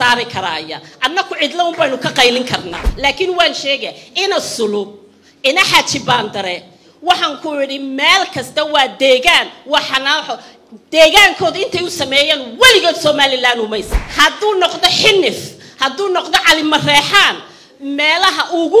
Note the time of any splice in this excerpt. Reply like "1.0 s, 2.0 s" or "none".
2.8 s, 14.0 s